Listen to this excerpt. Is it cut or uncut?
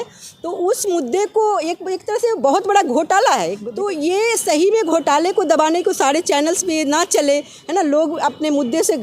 cut